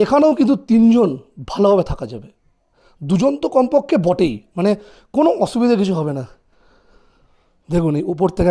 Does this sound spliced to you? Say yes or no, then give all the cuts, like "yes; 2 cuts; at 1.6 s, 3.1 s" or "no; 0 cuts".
no; 0 cuts